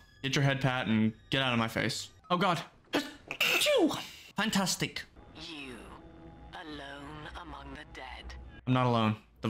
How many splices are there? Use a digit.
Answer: 2